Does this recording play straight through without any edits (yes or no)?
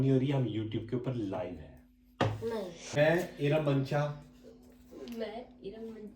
no